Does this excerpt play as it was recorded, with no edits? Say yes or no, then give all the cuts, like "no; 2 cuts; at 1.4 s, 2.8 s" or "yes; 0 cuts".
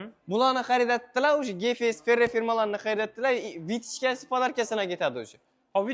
yes; 0 cuts